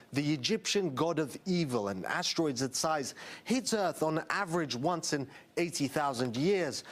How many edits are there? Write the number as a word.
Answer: zero